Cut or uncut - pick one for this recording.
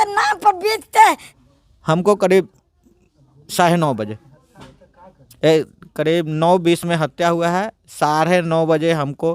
cut